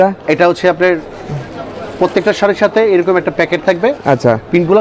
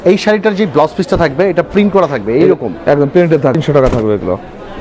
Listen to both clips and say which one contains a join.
second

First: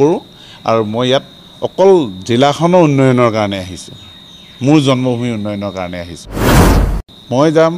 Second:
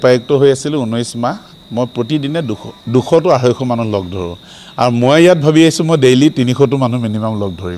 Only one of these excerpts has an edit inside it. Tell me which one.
first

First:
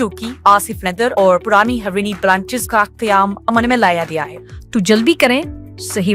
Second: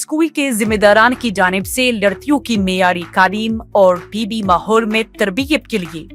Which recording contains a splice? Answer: first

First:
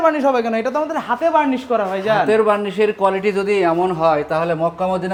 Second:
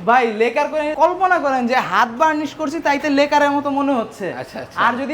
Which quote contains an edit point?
second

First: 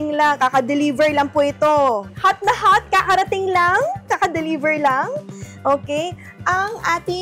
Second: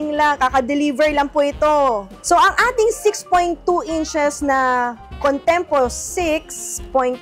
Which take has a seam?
first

